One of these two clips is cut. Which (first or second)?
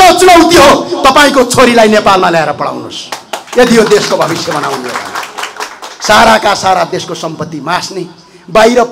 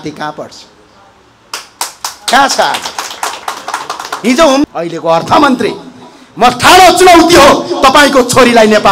second